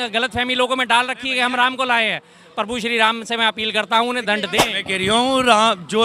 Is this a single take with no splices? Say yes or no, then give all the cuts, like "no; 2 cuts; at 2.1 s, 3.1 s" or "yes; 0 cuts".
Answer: no; 1 cut; at 4.6 s